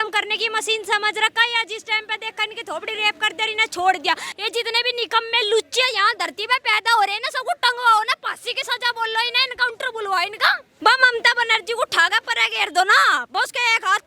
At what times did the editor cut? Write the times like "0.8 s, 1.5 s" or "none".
4.2 s, 10.7 s